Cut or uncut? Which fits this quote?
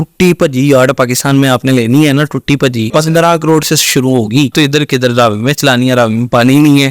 cut